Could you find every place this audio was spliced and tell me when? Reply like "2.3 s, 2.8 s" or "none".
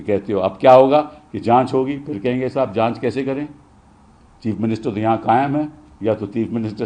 none